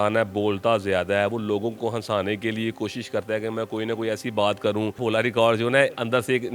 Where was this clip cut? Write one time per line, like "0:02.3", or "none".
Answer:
0:05.0